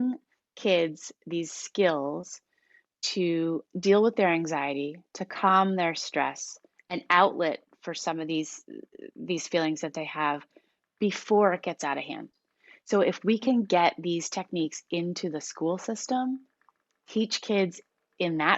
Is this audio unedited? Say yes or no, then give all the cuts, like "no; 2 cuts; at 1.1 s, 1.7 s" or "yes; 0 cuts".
yes; 0 cuts